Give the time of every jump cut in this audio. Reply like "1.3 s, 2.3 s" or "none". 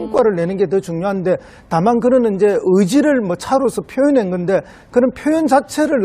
2.0 s